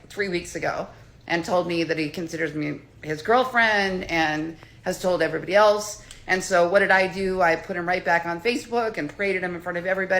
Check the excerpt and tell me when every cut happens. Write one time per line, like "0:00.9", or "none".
0:06.1